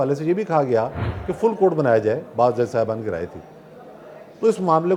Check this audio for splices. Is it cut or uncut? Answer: uncut